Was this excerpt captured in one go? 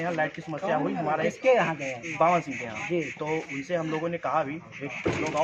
yes; 0 cuts

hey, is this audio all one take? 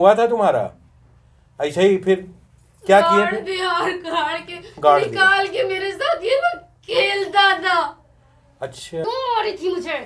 no; 1 cut; at 9.0 s

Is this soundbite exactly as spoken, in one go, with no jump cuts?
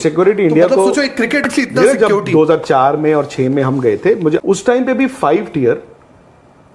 no; 2 cuts; at 1.5 s, 4.5 s

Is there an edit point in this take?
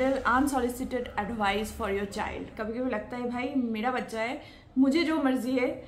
yes; 1 cut; at 2.5 s

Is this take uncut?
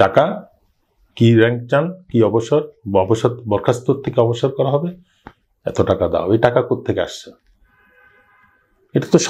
yes; 0 cuts

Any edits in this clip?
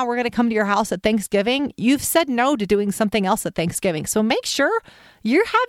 no; 0 cuts

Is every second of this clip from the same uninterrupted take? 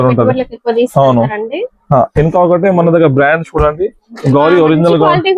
yes; 0 cuts

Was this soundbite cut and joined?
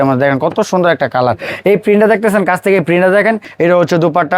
yes; 1 cut; at 3.5 s

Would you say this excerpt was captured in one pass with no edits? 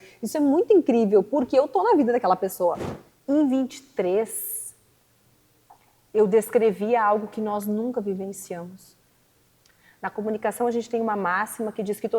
no; 1 cut; at 2.9 s

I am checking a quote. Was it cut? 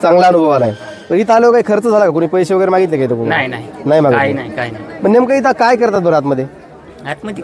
no; 0 cuts

